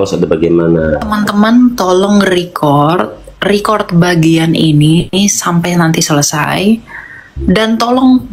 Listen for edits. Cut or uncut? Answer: cut